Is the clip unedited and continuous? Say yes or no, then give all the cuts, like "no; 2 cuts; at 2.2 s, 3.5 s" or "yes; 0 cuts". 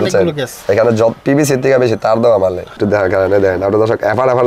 no; 1 cut; at 2.8 s